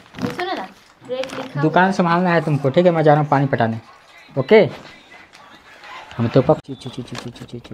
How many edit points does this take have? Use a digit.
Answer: 1